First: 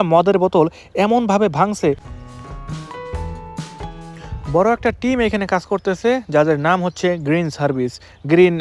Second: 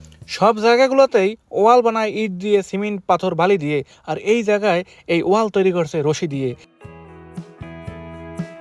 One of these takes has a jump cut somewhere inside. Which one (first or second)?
first